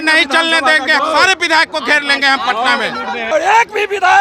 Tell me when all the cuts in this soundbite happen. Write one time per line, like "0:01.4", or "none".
0:01.0
0:03.3